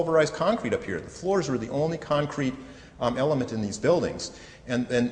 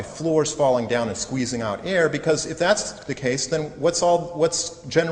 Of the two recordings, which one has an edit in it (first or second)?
first